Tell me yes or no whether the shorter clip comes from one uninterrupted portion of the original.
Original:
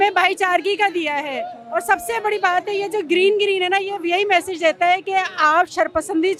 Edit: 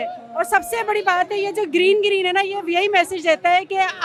yes